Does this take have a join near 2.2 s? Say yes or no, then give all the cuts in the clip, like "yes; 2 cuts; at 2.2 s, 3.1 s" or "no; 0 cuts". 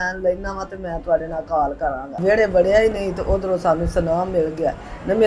yes; 1 cut; at 2.2 s